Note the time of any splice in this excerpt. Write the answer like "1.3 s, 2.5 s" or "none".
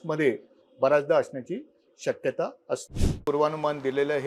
3.2 s